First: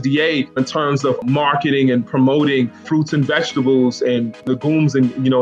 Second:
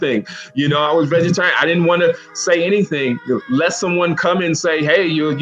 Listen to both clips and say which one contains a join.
first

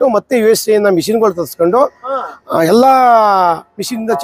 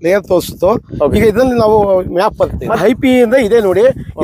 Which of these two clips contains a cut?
second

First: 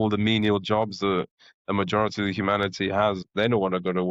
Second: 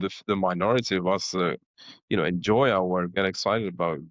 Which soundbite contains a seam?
second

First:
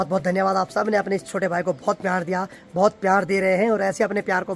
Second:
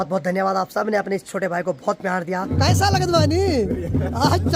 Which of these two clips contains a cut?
second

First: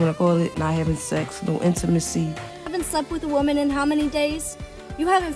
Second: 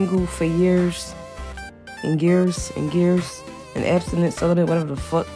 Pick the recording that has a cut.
first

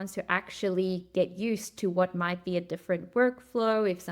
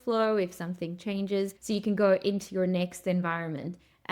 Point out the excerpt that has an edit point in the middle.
second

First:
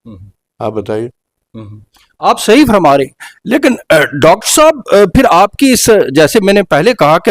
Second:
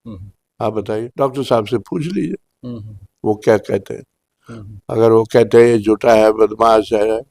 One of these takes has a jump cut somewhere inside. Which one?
second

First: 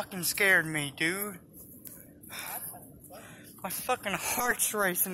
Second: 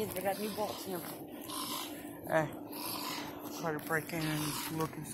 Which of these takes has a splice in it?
first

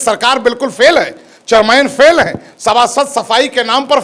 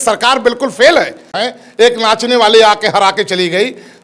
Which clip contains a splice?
second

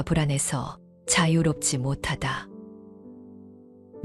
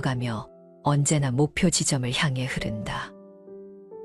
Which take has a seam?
second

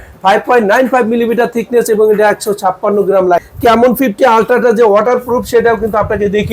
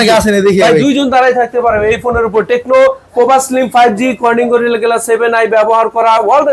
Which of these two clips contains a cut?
first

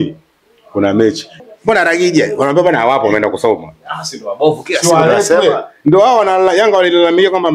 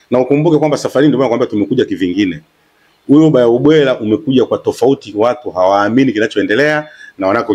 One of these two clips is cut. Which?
first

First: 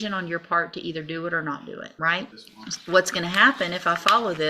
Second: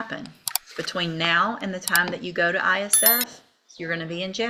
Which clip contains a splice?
first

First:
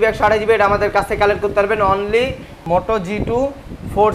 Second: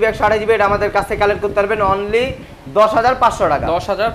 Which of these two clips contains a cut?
first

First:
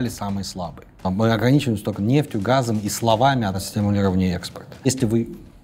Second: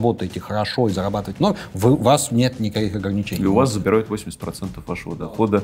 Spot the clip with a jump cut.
first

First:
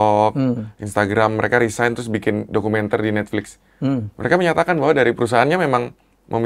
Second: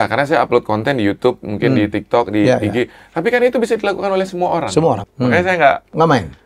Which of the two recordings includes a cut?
second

